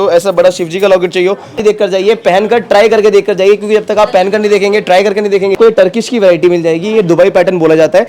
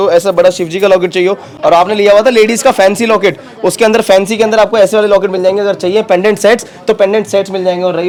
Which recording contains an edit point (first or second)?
first